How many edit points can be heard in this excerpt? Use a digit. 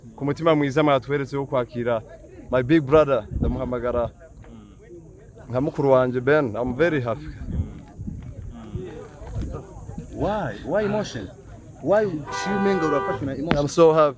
0